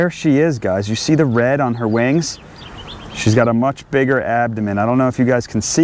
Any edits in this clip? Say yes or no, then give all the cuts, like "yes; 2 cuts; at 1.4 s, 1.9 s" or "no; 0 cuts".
no; 0 cuts